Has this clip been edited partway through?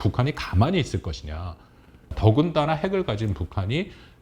yes; 1 cut; at 2.0 s

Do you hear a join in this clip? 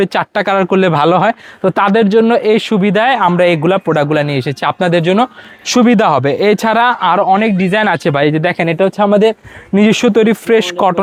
no; 0 cuts

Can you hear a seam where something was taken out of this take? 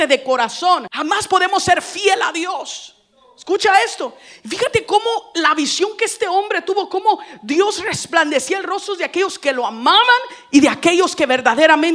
yes; 1 cut; at 0.9 s

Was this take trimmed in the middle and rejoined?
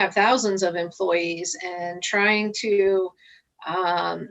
no; 0 cuts

